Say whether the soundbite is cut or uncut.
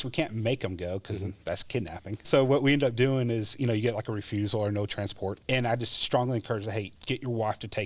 cut